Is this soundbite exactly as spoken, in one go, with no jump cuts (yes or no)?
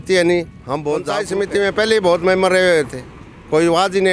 no